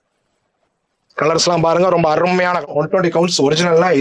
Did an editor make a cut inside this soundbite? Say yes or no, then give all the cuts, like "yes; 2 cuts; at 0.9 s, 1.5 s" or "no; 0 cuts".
yes; 1 cut; at 2.7 s